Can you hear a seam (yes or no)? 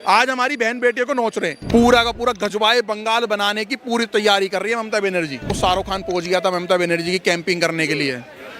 yes